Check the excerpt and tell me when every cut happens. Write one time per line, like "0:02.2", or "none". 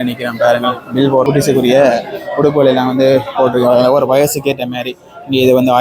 0:01.2